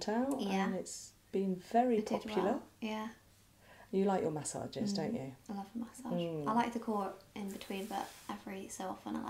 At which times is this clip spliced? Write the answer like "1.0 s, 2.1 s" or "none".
none